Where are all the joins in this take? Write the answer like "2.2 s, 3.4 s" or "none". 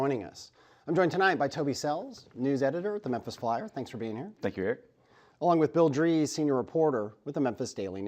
1.1 s